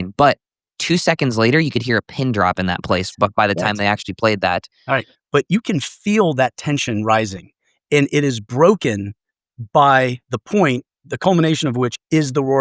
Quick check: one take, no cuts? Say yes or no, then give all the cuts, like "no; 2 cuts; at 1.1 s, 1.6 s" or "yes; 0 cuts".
no; 1 cut; at 4.8 s